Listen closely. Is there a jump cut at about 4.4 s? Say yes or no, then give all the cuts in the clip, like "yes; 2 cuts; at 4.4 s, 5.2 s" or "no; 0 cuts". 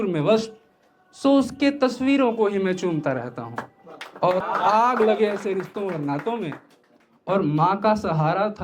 yes; 1 cut; at 4.4 s